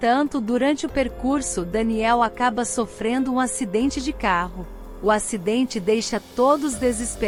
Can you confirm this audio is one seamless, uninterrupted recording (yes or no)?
yes